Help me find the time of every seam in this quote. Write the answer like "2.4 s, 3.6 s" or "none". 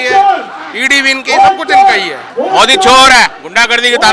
2.3 s